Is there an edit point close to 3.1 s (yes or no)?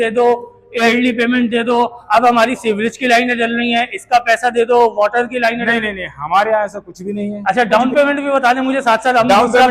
no